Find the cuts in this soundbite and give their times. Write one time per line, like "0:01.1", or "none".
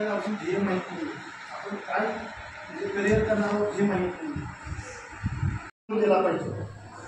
0:05.8